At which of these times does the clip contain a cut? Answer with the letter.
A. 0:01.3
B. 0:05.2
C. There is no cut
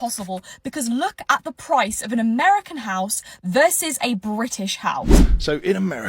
B